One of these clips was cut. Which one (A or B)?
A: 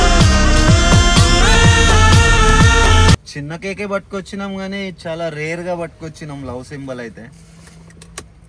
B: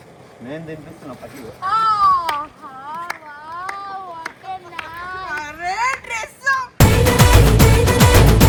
A